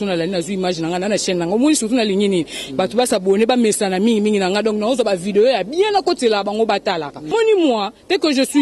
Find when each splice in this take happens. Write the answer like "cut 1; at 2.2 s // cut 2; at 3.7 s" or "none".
cut 1; at 7.3 s